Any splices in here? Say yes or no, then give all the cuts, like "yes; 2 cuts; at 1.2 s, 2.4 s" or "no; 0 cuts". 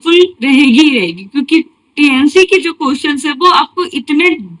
no; 0 cuts